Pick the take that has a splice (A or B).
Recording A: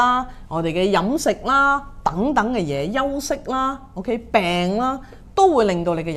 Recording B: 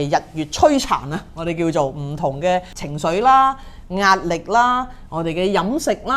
B